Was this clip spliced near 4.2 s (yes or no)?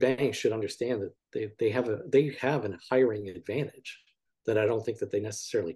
no